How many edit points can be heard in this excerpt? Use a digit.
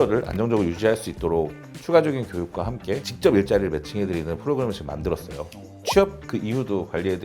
1